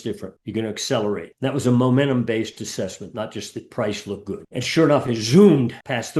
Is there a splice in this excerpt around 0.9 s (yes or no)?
no